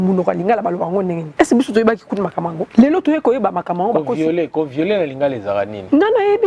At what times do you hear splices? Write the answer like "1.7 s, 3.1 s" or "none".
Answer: 1.2 s, 2.6 s